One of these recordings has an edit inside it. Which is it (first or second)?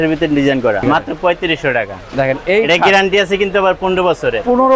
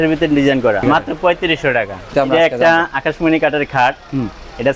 second